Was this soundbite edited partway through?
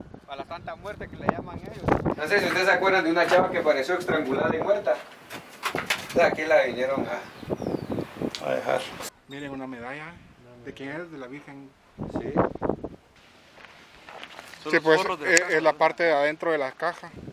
yes; 3 cuts; at 2.2 s, 8.9 s, 13.2 s

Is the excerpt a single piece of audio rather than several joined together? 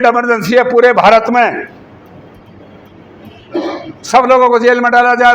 yes; 0 cuts

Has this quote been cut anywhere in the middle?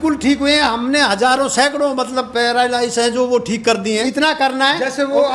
no; 0 cuts

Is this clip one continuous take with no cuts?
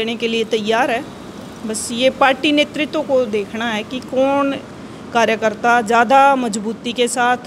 yes; 0 cuts

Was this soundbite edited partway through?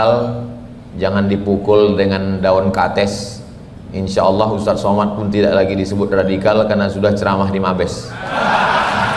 no; 0 cuts

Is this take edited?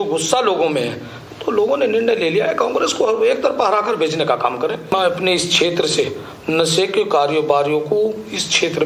yes; 1 cut; at 4.9 s

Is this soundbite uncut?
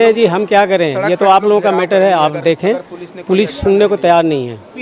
yes; 0 cuts

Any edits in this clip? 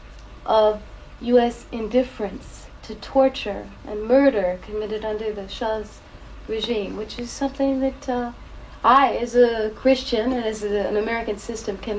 no; 0 cuts

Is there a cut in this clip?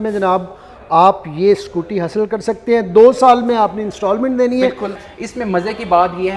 yes; 1 cut; at 5.0 s

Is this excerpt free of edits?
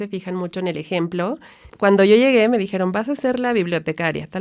no; 1 cut; at 1.7 s

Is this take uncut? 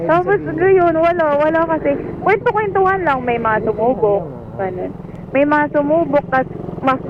yes; 0 cuts

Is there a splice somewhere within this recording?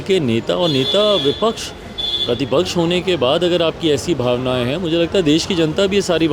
no; 0 cuts

